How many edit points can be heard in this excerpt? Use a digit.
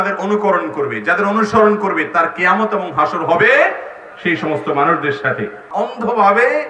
1